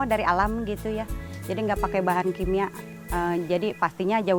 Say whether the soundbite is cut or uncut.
uncut